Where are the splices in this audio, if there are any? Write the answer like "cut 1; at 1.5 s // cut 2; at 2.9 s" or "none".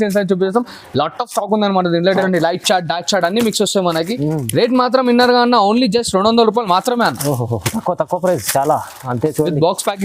cut 1; at 2.1 s